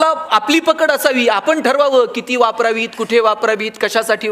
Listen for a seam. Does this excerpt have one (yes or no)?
no